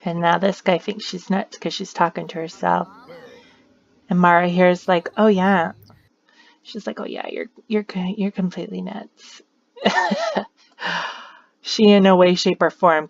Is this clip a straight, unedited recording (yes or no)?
yes